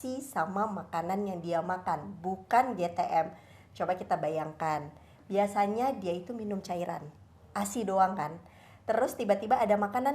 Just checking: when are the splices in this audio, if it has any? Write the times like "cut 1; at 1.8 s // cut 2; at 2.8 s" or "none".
none